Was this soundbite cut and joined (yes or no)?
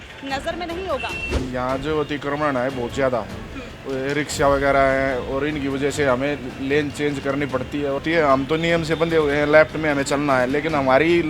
yes